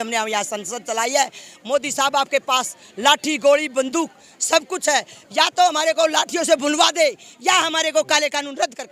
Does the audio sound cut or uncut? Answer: uncut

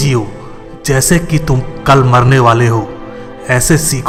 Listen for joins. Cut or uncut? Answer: uncut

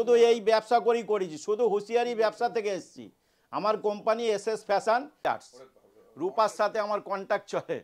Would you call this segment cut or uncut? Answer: cut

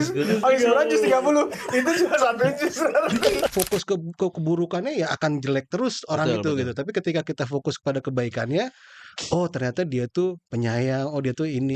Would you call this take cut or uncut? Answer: cut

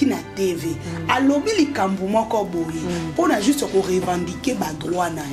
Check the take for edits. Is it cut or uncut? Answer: uncut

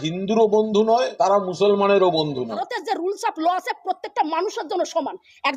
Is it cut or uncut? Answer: cut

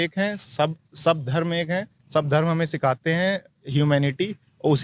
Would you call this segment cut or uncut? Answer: uncut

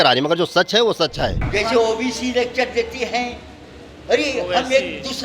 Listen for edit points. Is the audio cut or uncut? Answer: cut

